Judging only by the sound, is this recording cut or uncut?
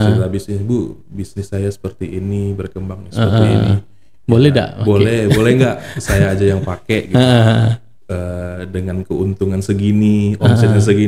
uncut